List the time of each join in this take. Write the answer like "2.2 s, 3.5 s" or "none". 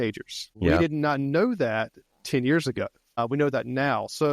0.7 s, 3.2 s